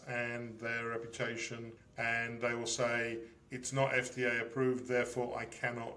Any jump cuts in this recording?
yes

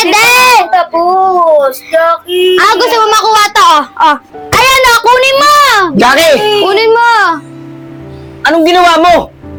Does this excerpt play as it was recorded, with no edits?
yes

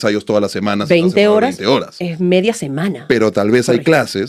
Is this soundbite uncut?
yes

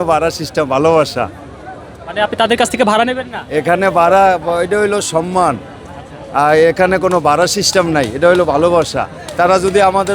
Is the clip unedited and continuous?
yes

